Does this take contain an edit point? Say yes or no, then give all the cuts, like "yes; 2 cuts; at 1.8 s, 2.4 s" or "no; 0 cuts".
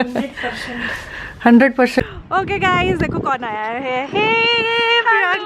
yes; 1 cut; at 2.0 s